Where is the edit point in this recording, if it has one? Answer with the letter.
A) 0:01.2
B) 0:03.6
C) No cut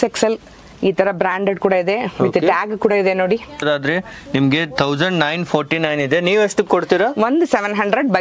B